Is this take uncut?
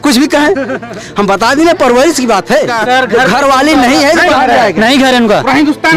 no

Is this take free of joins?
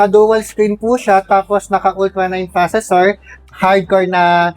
no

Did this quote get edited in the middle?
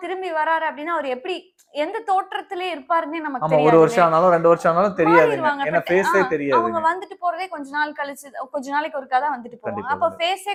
no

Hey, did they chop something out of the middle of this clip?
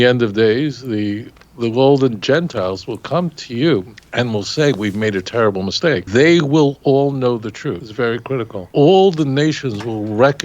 yes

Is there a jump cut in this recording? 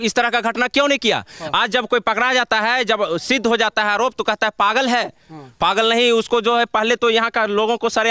no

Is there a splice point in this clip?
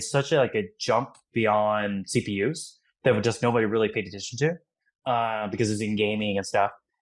no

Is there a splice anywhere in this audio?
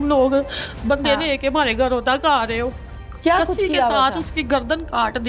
yes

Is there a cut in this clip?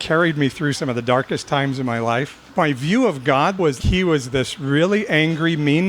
yes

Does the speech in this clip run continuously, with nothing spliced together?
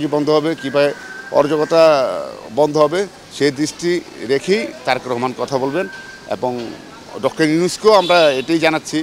yes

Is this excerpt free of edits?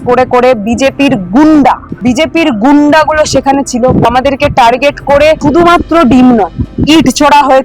no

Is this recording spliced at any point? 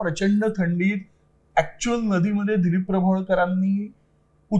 no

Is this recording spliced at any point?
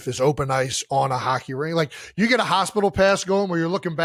no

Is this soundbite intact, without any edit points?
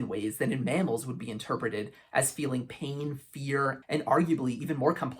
no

